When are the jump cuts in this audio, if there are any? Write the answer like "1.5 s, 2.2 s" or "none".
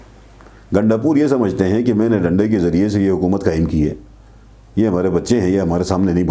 none